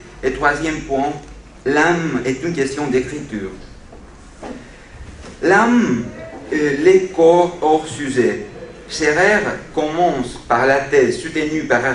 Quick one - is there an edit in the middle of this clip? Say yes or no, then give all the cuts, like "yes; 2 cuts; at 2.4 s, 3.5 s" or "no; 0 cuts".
no; 0 cuts